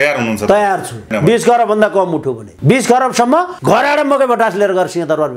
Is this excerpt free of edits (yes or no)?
no